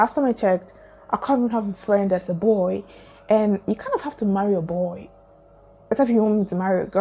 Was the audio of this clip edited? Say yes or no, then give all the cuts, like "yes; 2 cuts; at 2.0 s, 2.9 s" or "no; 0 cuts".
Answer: yes; 1 cut; at 1.4 s